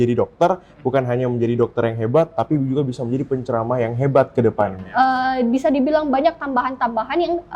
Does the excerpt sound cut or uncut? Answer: cut